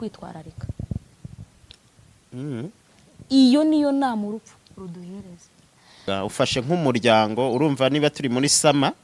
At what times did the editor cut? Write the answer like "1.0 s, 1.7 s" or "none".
6.1 s

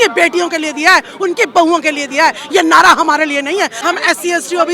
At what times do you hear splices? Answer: 3.8 s

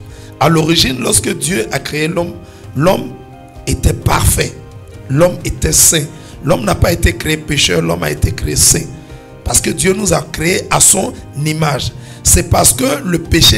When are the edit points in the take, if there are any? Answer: none

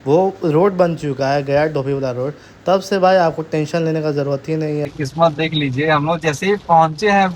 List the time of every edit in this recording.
4.9 s

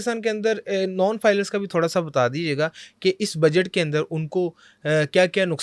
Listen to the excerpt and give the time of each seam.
none

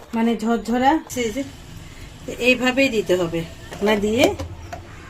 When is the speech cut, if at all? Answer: 1.1 s, 3.7 s

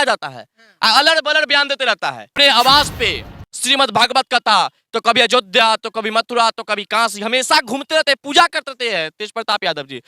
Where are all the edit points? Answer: 2.3 s

